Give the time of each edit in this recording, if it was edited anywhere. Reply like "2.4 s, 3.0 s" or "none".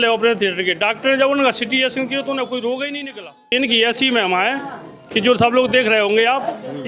3.5 s